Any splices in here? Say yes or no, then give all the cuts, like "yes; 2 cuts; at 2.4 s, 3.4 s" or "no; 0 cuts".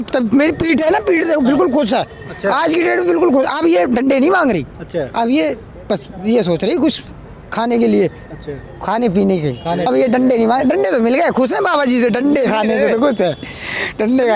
no; 0 cuts